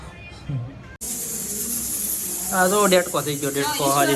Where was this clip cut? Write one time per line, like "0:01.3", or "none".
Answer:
0:01.1